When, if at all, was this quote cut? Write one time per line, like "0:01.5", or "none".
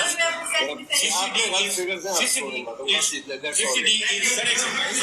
none